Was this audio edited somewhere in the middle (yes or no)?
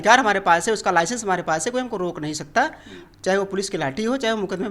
no